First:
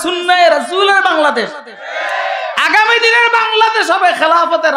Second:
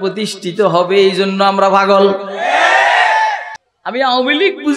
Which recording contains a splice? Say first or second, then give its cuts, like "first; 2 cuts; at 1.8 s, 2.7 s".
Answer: second; 1 cut; at 3.5 s